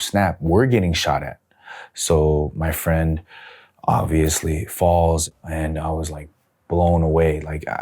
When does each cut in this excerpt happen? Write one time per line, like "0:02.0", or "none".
0:05.4